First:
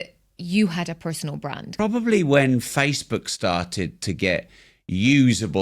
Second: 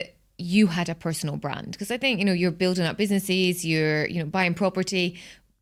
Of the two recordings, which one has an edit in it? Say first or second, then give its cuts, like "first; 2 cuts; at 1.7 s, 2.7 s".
first; 1 cut; at 1.6 s